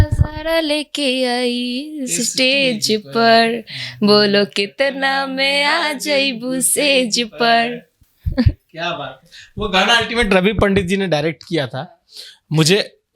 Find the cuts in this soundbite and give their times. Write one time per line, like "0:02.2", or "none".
none